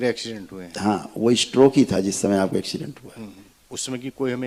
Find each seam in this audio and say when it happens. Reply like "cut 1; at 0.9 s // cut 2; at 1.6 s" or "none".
none

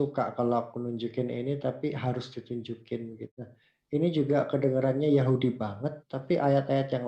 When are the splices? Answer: cut 1; at 3.3 s

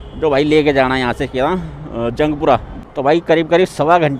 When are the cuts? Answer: cut 1; at 2.7 s

